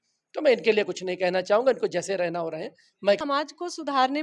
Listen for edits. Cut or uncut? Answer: cut